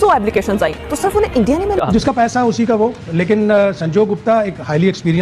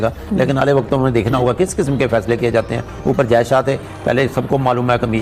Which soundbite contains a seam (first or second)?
first